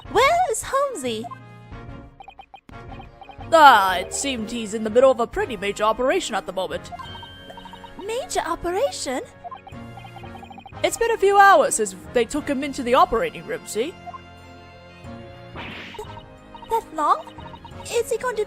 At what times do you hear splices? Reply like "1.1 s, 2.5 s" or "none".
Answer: 5.9 s